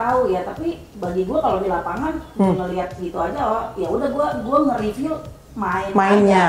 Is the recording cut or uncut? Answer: uncut